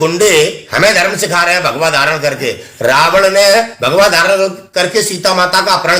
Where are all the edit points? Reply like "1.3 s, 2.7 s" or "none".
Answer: none